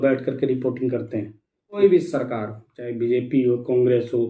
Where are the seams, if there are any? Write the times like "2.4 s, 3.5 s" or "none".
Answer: 1.8 s